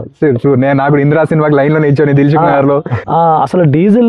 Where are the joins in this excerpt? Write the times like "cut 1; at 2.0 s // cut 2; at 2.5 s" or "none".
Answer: cut 1; at 3.0 s